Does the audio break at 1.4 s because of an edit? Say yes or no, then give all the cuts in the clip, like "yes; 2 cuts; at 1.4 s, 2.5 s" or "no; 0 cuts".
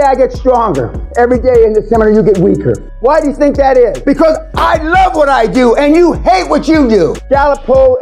no; 3 cuts; at 2.9 s, 4.0 s, 7.2 s